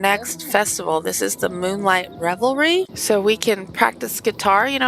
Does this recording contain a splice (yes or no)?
yes